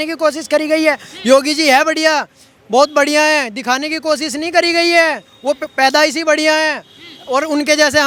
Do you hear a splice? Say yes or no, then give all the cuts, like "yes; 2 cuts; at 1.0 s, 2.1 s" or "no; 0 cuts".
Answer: no; 0 cuts